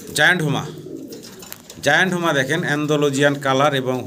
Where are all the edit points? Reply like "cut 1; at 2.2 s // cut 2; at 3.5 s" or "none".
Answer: none

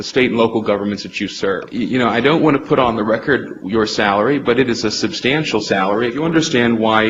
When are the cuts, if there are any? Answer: cut 1; at 1.7 s // cut 2; at 6.1 s

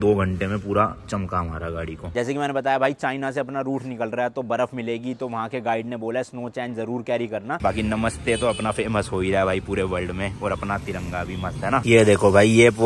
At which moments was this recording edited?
cut 1; at 2.1 s // cut 2; at 7.6 s // cut 3; at 11.8 s

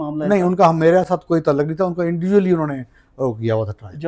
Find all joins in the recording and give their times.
none

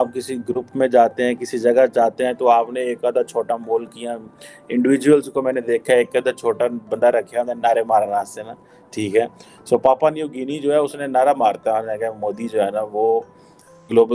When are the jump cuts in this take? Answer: none

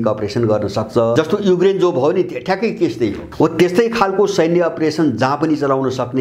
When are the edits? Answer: cut 1; at 1.1 s // cut 2; at 3.2 s

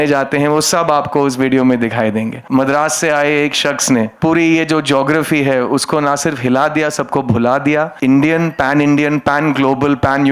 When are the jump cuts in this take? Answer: cut 1; at 2.4 s // cut 2; at 4.1 s // cut 3; at 7.9 s

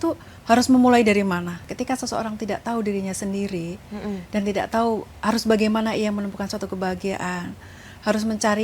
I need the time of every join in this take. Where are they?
cut 1; at 1.6 s

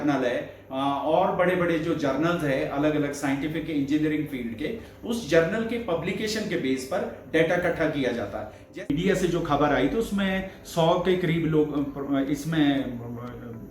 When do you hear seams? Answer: cut 1; at 8.9 s

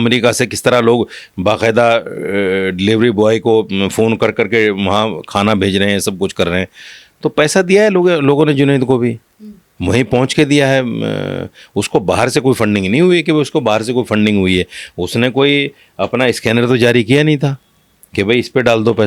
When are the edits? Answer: none

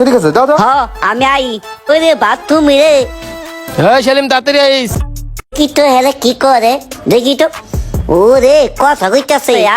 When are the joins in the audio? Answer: cut 1; at 1.9 s // cut 2; at 5.0 s

